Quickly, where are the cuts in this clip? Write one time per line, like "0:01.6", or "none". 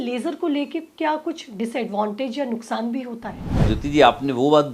0:03.6